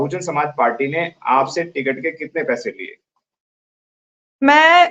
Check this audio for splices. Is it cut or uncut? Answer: uncut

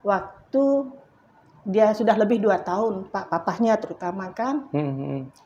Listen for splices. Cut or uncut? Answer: uncut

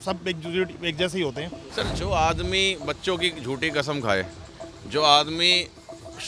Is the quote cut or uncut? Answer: cut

